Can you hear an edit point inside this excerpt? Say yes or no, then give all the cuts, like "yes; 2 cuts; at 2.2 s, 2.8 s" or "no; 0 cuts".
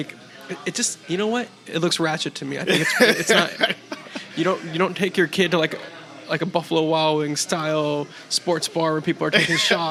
no; 0 cuts